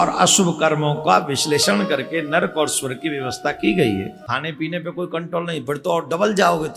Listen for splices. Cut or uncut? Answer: cut